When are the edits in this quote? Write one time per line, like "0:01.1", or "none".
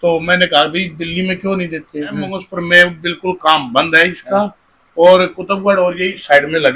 0:02.4